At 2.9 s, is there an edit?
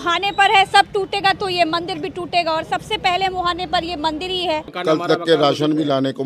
no; 1 cut; at 4.7 s

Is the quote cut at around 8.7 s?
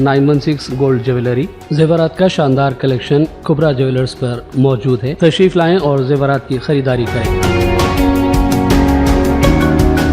no; 0 cuts

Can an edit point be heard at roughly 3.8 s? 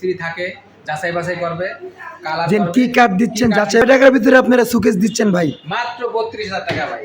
yes; 1 cut; at 3.8 s

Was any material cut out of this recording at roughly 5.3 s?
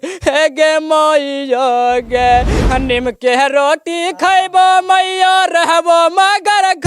no; 1 cut; at 2.6 s

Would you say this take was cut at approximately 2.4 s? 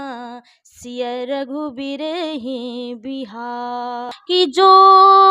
no; 1 cut; at 4.1 s

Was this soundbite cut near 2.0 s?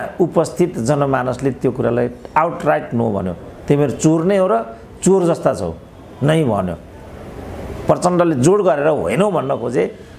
no; 0 cuts

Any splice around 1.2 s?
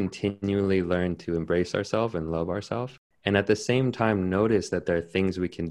no; 1 cut; at 2.9 s

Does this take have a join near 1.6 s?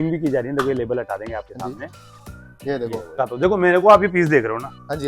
no; 1 cut; at 3.2 s

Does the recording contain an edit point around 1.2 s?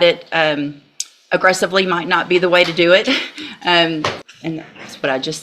no; 1 cut; at 4.2 s

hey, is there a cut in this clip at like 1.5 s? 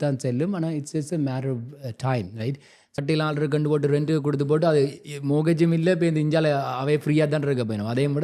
no; 1 cut; at 2.9 s

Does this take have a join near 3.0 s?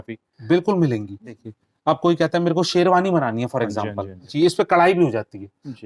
no; 2 cuts; at 1.4 s, 4.2 s

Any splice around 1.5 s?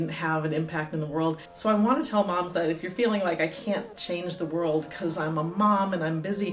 yes; 1 cut; at 1.5 s

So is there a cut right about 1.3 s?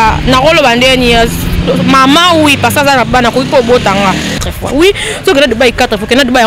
no; 1 cut; at 4.4 s

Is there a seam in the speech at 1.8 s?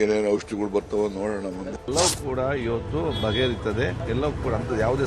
yes; 2 cuts; at 1.8 s, 4.0 s

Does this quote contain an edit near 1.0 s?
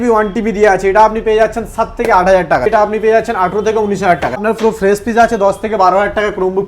no; 2 cuts; at 2.7 s, 4.4 s

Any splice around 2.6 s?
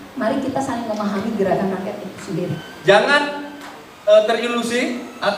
yes; 1 cut; at 2.6 s

